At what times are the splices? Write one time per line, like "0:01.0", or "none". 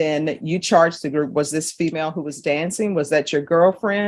none